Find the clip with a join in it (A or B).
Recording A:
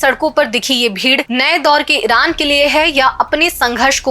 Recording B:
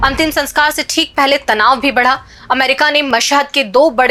A